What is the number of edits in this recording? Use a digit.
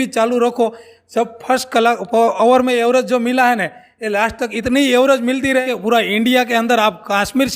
1